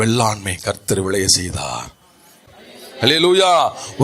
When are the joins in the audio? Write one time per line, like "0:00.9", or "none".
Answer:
0:02.5